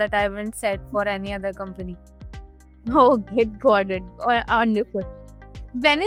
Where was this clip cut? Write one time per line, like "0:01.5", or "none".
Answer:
none